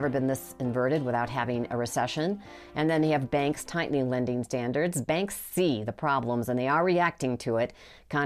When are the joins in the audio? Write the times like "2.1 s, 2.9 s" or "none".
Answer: none